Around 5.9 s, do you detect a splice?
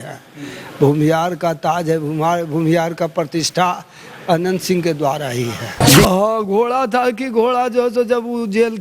yes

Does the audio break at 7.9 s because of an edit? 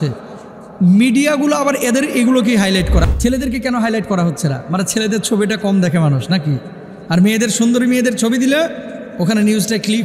no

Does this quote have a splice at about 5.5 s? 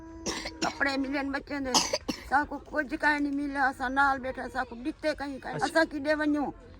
yes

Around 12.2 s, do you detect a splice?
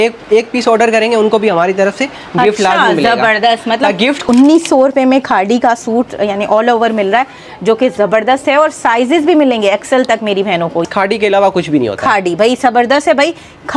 no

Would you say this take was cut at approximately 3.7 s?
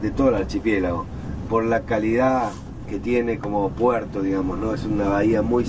no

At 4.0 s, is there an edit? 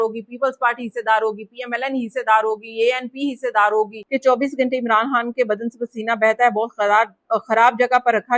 yes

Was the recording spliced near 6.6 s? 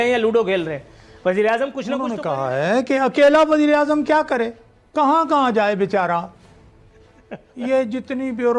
no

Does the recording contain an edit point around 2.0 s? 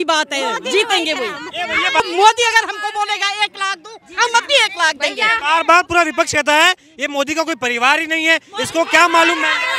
yes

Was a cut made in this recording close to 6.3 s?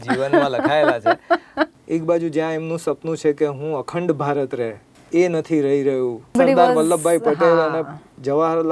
yes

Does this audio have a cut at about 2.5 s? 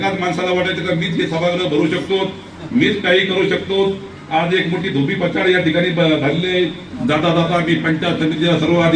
no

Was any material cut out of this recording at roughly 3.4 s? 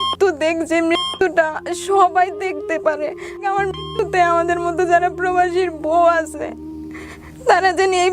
yes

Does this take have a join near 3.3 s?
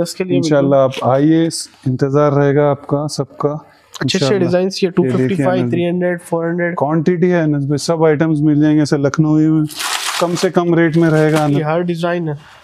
no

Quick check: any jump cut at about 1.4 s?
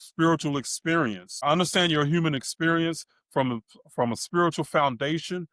yes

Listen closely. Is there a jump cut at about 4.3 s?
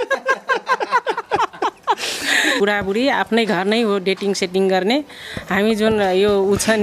no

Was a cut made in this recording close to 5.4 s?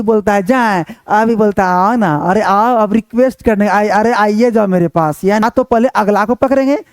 yes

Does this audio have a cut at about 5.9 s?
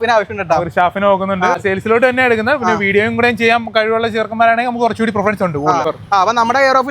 yes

